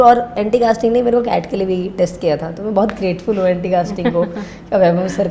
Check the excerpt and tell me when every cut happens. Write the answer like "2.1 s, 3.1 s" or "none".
none